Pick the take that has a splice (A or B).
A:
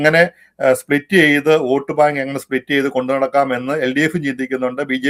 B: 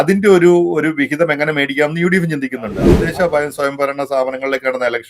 B